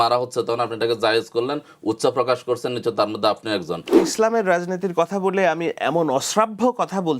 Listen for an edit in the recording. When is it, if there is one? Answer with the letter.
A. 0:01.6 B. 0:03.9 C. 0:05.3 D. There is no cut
B